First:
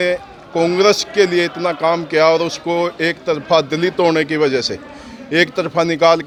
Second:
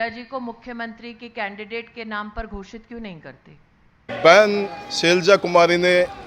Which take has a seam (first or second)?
second